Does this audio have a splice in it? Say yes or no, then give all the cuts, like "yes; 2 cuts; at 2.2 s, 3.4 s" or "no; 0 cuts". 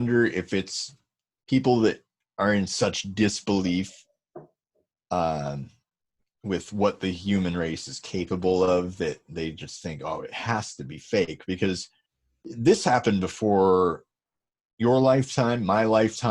no; 0 cuts